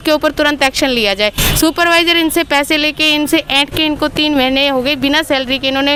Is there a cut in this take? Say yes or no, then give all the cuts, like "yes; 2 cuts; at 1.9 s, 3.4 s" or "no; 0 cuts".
no; 0 cuts